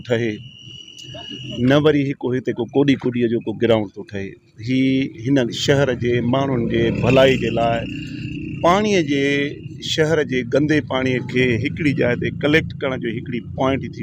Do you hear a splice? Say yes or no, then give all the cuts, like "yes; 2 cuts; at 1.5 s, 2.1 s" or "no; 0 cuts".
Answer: no; 0 cuts